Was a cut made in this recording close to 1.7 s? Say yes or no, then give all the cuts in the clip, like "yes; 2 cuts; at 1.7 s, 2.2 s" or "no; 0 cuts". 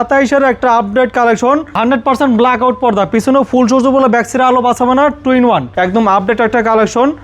yes; 2 cuts; at 1.7 s, 5.7 s